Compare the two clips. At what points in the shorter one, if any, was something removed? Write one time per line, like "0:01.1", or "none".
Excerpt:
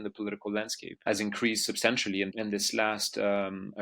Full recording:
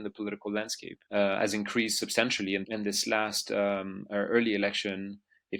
0:01.0